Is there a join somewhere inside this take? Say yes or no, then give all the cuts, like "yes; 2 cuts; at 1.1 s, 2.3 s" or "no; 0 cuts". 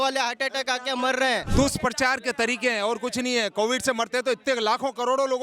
yes; 1 cut; at 1.5 s